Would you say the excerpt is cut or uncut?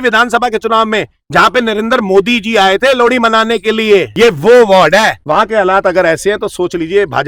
cut